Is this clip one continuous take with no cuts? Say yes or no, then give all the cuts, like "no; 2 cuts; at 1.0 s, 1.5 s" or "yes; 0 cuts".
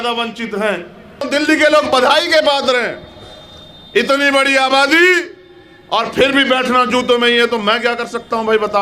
no; 1 cut; at 1.3 s